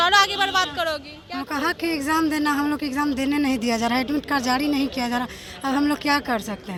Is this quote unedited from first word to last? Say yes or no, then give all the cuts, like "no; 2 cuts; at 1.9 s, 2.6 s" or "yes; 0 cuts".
yes; 0 cuts